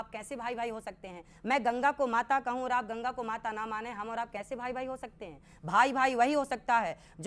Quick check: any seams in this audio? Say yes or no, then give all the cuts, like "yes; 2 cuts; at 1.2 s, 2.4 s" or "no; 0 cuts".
no; 0 cuts